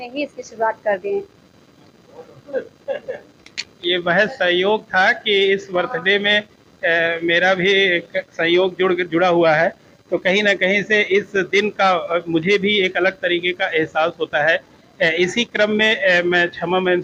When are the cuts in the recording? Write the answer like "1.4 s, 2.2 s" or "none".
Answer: none